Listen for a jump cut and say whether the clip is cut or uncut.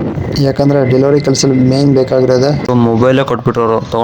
cut